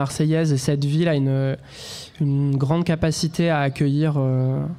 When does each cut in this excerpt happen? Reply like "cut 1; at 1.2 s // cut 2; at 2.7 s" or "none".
none